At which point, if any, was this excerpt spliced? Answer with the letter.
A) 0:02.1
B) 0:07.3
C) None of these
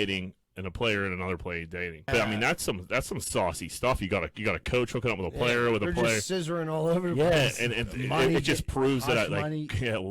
A